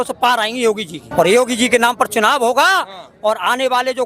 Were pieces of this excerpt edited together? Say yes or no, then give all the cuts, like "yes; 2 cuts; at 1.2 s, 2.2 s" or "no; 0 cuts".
yes; 1 cut; at 1.0 s